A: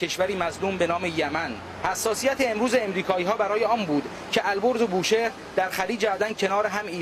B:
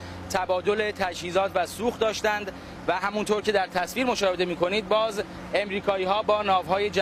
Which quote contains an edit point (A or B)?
B